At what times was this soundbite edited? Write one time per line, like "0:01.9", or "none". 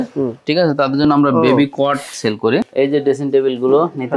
0:02.6